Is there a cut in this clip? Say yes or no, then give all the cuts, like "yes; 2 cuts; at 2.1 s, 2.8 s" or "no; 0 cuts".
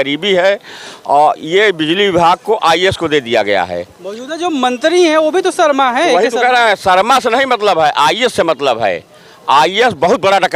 no; 0 cuts